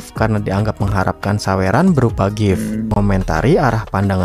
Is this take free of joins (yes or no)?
no